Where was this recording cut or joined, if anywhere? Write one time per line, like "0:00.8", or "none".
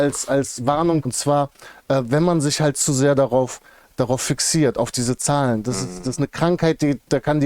0:01.1

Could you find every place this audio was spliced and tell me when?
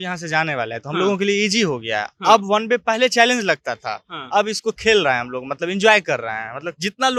none

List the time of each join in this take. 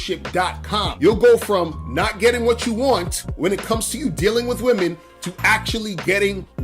0:00.9

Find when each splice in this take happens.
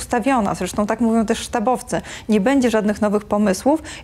none

